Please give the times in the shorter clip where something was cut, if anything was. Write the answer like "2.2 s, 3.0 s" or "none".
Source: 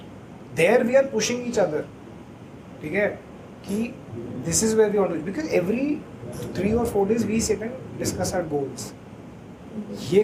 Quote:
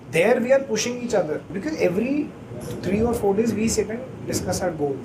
1.5 s